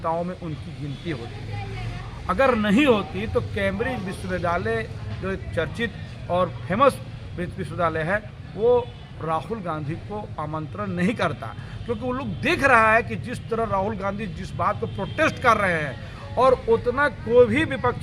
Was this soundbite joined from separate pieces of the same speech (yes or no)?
no